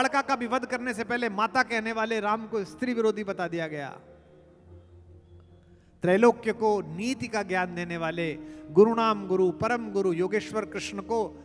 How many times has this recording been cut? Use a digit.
0